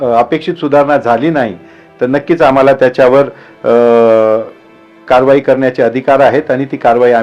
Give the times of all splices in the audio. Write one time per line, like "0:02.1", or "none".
none